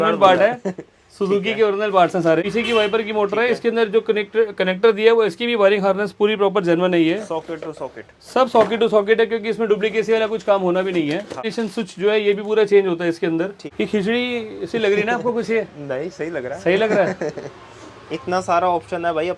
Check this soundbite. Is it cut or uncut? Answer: cut